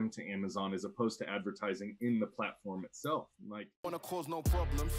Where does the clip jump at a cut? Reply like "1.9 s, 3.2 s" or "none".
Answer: 3.4 s